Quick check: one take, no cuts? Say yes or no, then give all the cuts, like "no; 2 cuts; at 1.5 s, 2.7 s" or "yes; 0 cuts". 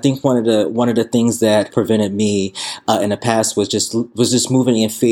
yes; 0 cuts